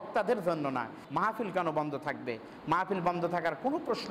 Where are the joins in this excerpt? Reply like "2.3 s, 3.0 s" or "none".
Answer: 1.0 s